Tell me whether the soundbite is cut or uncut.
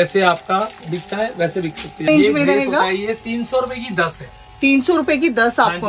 cut